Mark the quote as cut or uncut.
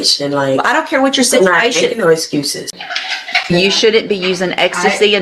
cut